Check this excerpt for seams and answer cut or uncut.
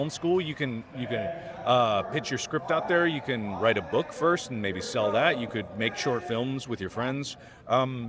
uncut